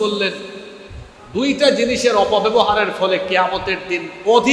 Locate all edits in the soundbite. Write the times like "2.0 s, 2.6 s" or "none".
none